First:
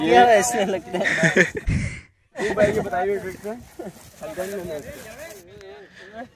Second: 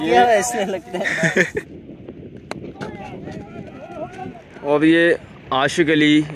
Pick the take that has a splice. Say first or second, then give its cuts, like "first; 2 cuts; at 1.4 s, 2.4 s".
second; 2 cuts; at 1.7 s, 4.3 s